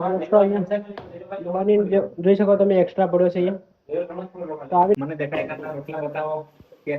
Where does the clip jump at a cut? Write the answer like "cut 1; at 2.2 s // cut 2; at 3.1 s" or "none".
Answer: cut 1; at 4.9 s